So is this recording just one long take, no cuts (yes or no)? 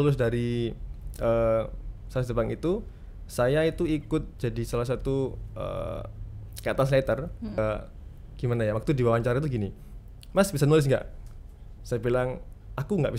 no